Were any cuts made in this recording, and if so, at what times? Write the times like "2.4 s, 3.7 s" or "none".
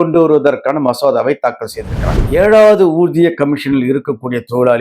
2.2 s